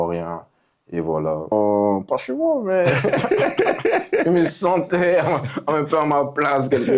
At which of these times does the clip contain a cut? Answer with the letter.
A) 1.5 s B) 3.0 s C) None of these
A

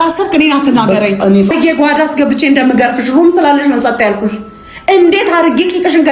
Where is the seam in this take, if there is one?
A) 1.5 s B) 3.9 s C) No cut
A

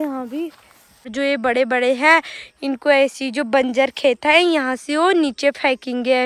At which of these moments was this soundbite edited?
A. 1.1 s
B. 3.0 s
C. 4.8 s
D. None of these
A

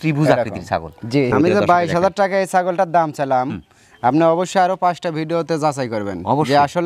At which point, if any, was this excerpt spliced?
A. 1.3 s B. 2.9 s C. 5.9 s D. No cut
A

